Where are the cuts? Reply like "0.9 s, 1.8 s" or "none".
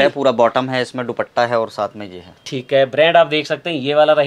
none